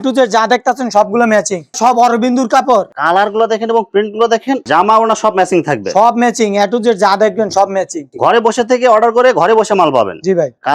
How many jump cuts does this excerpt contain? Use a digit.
3